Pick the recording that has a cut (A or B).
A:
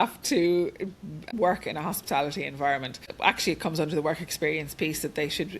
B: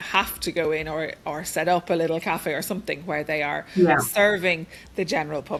A